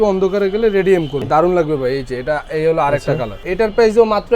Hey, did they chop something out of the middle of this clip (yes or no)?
yes